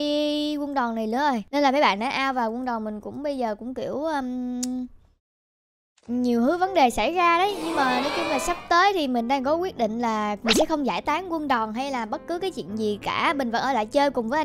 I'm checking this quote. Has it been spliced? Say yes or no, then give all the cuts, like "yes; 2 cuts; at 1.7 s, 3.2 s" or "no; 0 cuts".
no; 0 cuts